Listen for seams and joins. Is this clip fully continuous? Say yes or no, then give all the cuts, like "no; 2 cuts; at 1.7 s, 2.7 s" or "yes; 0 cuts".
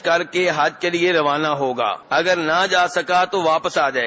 no; 1 cut; at 2.0 s